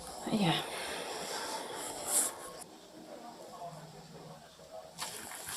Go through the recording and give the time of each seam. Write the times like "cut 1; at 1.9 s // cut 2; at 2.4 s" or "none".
cut 1; at 2.6 s